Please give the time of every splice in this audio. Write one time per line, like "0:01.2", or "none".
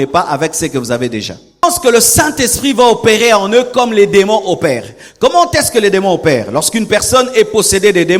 0:01.6